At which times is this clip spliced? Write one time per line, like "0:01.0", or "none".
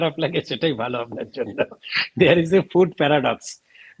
none